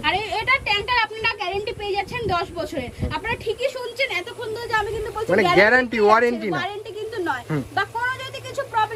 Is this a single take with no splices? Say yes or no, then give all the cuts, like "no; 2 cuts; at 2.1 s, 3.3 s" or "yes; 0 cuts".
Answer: yes; 0 cuts